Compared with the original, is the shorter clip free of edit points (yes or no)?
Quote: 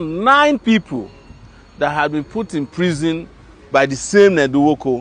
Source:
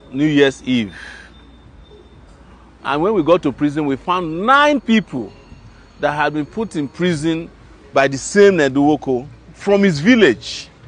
yes